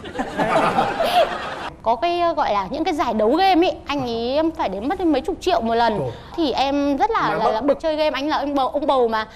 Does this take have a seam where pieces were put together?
yes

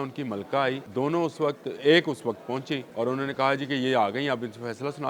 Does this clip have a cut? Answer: yes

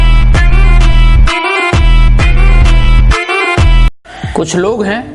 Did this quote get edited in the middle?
yes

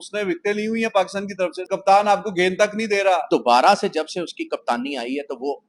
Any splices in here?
yes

